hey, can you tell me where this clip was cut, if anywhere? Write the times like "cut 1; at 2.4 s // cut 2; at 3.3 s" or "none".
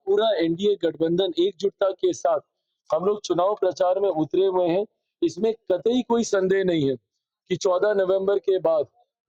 none